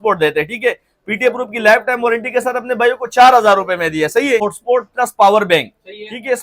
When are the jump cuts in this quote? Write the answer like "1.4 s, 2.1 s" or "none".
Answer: 4.4 s